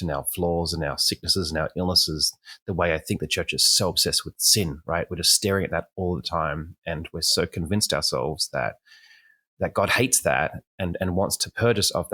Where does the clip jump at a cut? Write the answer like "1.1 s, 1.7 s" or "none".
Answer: none

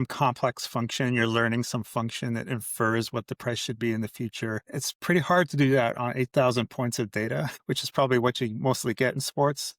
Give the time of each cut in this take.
4.7 s, 7.5 s

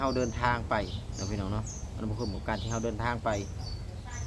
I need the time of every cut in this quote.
none

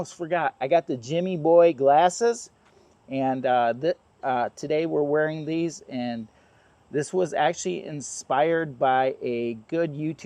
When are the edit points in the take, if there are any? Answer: none

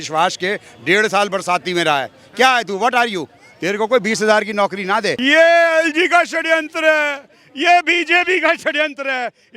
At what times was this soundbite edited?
5.2 s

